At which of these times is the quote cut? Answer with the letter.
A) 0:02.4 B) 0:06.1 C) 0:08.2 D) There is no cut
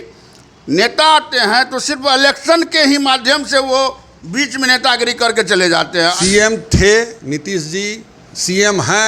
B